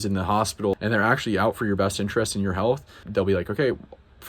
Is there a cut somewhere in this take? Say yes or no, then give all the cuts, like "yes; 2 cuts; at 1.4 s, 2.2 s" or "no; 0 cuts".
yes; 2 cuts; at 0.7 s, 3.0 s